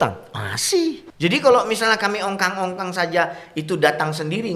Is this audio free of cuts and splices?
no; 1 cut; at 1.1 s

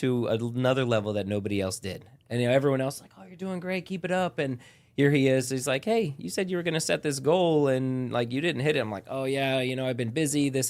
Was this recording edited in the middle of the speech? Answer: no; 0 cuts

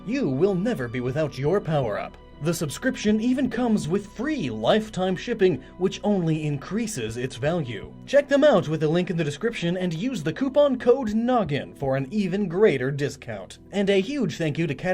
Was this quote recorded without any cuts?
no; 1 cut; at 7.0 s

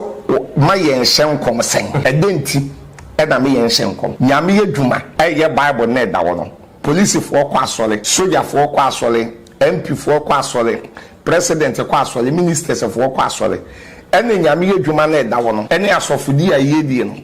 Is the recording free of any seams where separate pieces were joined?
no; 5 cuts; at 2.0 s, 4.1 s, 5.1 s, 8.1 s, 15.6 s

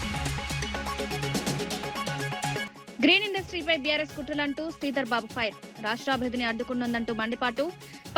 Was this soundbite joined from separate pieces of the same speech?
yes; 2 cuts; at 1.0 s, 2.8 s

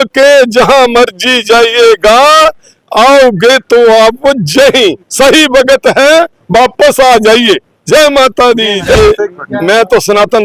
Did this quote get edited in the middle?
yes; 1 cut; at 8.9 s

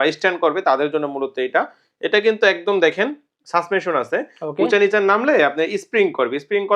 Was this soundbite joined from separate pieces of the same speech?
no; 0 cuts

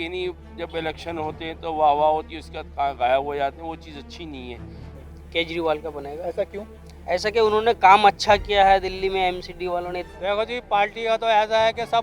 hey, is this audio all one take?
no; 2 cuts; at 4.9 s, 10.1 s

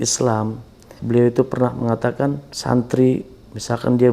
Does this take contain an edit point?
yes; 2 cuts; at 0.9 s, 2.5 s

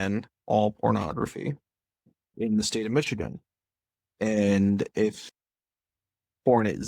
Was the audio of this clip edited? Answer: yes; 1 cut; at 2.3 s

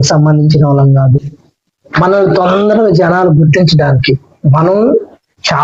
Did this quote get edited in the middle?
no; 0 cuts

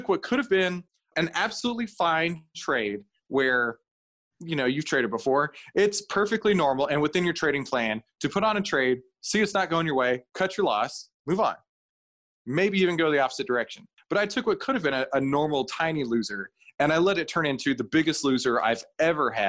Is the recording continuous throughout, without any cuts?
no; 1 cut; at 1.1 s

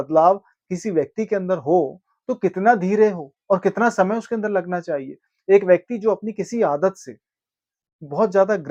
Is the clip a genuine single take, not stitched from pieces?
yes; 0 cuts

